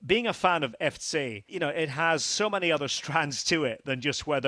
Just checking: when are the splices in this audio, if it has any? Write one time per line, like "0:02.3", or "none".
0:01.4

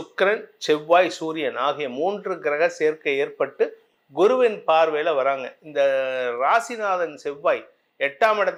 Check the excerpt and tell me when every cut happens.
none

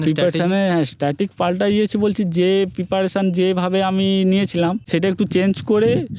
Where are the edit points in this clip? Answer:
none

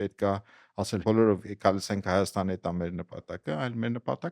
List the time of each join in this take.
0:01.0

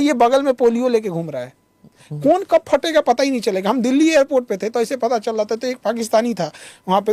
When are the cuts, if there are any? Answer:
none

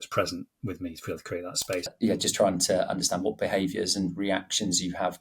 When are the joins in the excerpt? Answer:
0:01.9

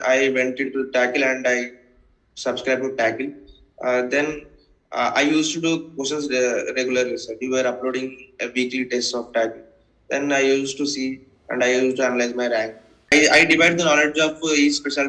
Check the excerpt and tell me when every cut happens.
0:13.1

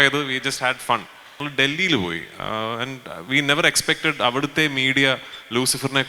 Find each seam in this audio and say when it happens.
0:01.3

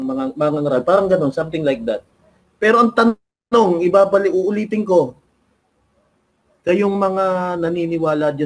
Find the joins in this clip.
none

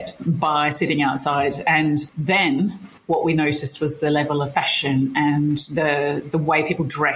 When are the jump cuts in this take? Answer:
0:02.1

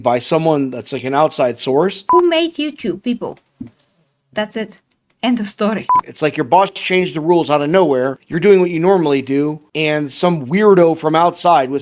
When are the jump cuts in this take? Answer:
0:02.0
0:06.0
0:08.2
0:09.7

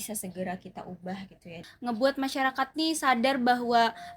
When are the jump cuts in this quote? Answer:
0:01.6

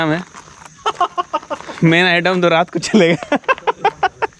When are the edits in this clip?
none

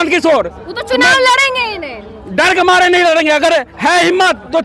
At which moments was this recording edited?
none

